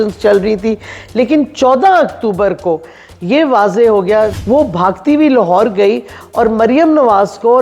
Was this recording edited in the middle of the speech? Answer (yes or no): yes